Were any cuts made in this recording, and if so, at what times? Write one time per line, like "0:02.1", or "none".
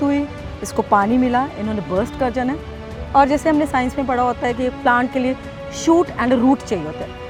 none